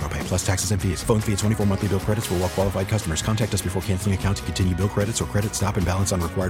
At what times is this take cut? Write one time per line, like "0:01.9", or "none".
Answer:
none